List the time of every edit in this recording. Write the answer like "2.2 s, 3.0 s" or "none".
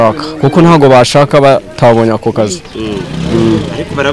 none